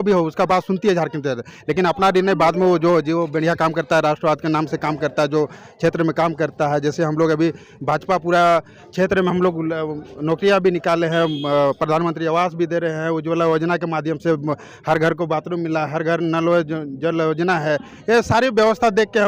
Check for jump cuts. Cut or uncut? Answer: uncut